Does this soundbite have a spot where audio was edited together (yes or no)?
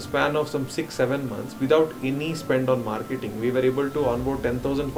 no